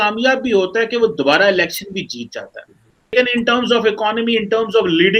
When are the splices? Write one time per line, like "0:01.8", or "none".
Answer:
0:03.1